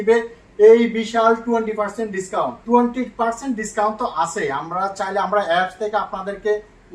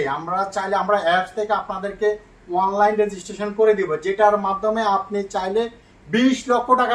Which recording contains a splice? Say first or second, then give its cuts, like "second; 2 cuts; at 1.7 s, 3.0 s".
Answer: first; 1 cut; at 2.6 s